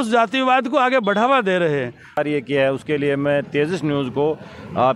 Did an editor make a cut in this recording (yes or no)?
yes